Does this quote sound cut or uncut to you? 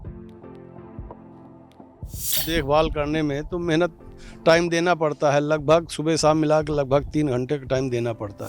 cut